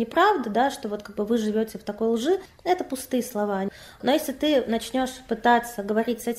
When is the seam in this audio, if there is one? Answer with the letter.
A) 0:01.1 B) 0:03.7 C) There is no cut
B